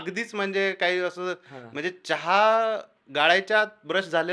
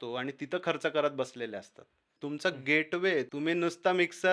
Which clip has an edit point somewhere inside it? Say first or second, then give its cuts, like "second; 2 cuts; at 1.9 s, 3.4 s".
second; 2 cuts; at 2.1 s, 3.3 s